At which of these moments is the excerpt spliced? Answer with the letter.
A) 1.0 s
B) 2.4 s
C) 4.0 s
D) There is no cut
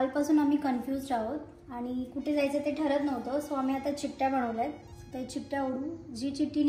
D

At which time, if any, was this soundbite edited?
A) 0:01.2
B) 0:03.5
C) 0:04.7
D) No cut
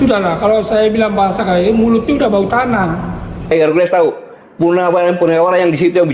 B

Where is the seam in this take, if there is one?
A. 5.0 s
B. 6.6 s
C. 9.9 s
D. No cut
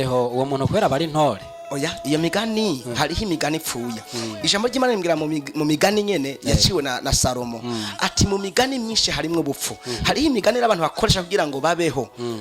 D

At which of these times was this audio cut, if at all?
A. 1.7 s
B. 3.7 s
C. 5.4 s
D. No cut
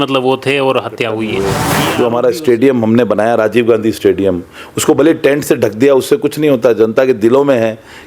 A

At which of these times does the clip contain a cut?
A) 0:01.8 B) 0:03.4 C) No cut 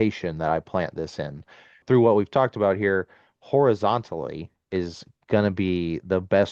A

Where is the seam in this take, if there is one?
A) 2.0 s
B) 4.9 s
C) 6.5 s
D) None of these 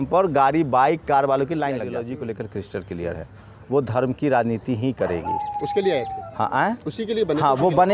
A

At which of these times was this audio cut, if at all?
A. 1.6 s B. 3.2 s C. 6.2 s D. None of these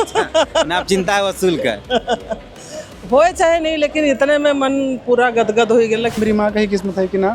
C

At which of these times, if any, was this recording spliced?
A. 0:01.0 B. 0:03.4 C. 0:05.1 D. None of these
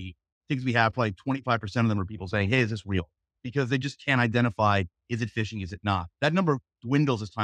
B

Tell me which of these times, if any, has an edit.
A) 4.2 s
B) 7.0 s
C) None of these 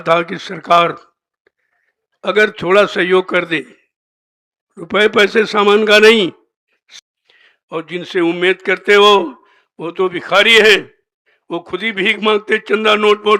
B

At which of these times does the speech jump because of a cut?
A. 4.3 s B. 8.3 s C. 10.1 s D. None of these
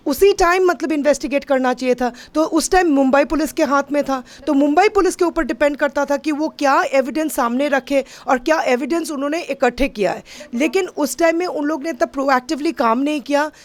D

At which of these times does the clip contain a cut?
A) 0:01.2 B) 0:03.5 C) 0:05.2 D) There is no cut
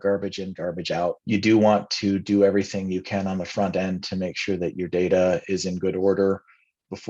A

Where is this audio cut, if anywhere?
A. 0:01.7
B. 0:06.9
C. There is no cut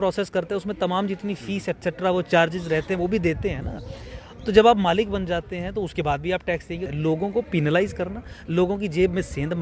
B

